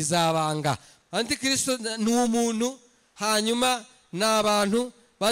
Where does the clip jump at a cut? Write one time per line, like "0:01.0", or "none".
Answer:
0:00.9